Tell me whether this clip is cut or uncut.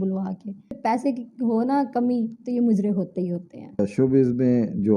cut